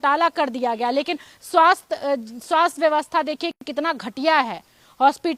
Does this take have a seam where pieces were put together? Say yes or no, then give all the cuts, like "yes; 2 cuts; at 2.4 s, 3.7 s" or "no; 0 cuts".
no; 0 cuts